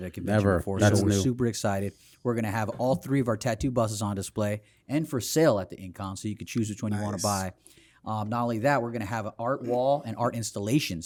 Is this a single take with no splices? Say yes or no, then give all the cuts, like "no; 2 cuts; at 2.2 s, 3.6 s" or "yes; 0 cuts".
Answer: yes; 0 cuts